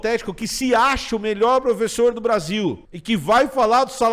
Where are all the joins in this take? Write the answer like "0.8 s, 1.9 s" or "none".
2.9 s

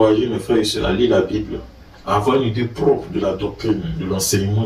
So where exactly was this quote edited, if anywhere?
none

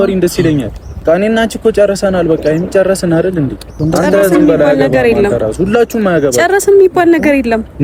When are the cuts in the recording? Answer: 1.0 s, 3.7 s

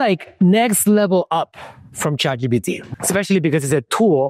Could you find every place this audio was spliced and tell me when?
none

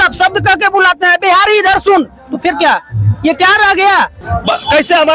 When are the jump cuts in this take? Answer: 4.2 s

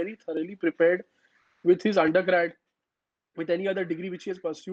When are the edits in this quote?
none

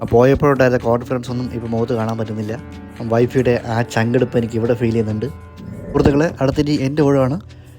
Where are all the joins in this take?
6.0 s

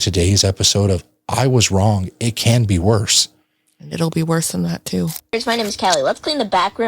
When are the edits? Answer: 5.3 s

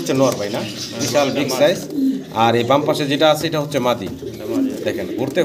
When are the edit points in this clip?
none

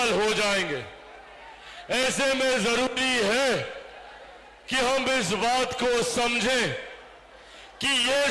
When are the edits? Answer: none

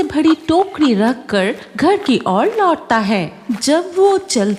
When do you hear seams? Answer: none

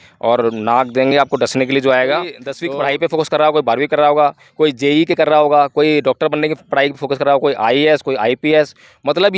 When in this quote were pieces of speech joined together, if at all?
2.5 s

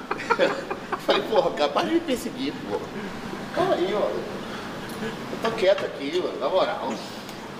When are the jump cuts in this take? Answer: none

